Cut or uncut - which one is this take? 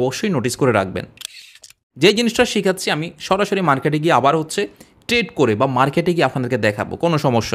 cut